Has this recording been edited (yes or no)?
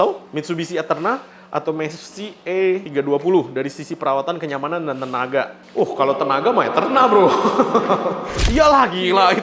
no